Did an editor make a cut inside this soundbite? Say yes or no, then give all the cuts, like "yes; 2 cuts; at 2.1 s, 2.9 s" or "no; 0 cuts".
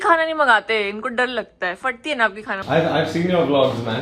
yes; 1 cut; at 2.5 s